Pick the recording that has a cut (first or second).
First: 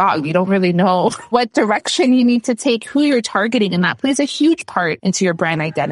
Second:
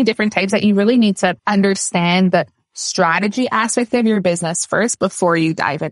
first